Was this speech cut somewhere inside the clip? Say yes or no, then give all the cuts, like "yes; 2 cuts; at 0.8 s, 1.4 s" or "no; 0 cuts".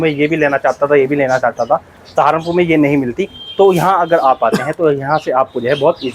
no; 0 cuts